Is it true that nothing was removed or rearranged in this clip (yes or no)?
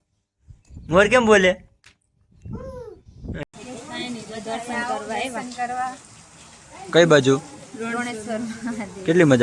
no